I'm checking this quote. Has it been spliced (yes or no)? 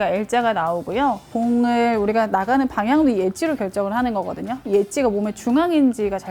yes